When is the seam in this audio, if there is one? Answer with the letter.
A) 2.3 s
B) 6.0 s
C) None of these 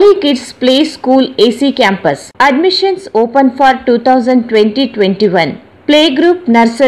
A